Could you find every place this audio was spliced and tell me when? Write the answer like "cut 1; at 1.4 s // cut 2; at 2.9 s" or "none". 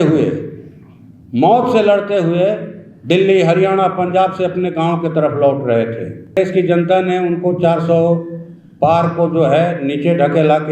cut 1; at 6.4 s